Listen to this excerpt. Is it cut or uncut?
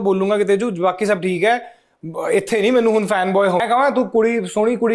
cut